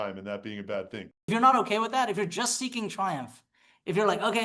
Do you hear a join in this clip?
yes; 1 cut; at 1.3 s

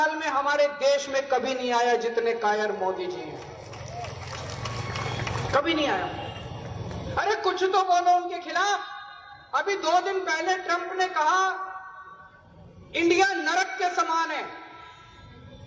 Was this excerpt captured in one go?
yes; 0 cuts

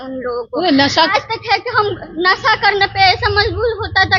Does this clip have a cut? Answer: yes; 1 cut; at 1.1 s

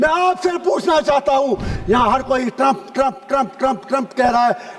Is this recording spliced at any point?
yes; 1 cut; at 1.7 s

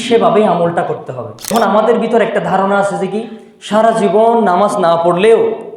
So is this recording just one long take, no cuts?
no; 1 cut; at 1.5 s

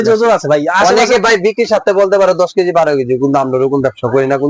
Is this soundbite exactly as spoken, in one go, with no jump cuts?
yes; 0 cuts

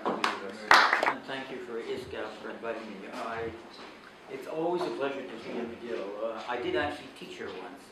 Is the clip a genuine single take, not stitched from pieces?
yes; 0 cuts

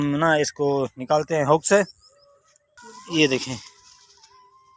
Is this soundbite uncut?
no; 1 cut; at 3.0 s

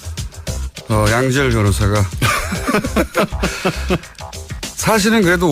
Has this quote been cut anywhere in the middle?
yes; 1 cut; at 1.1 s

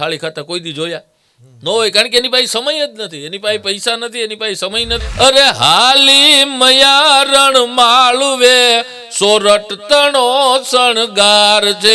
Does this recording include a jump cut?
yes; 1 cut; at 5.0 s

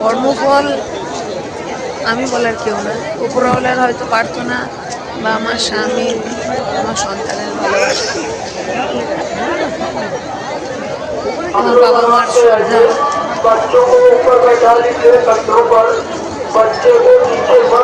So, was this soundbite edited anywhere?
no; 0 cuts

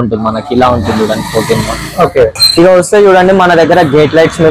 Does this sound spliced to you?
yes; 1 cut; at 2.3 s

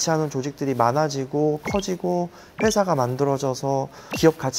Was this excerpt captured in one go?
yes; 0 cuts

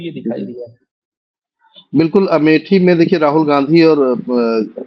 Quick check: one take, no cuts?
yes; 0 cuts

